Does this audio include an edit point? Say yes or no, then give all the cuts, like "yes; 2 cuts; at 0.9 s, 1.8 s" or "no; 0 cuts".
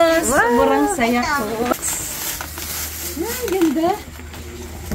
yes; 1 cut; at 1.8 s